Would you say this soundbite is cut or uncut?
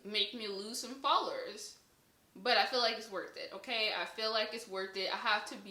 uncut